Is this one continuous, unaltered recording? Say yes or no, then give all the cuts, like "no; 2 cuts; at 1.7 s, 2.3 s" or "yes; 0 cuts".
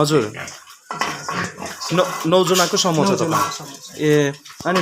yes; 0 cuts